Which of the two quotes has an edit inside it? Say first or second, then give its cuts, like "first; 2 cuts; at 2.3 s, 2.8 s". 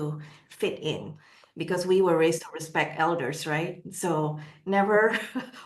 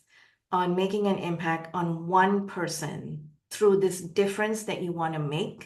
first; 1 cut; at 1.2 s